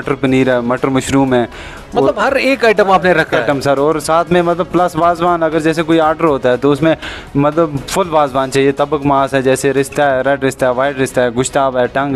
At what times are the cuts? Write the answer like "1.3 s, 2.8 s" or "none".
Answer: none